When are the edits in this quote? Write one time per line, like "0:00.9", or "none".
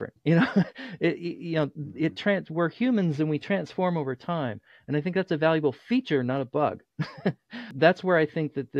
0:07.7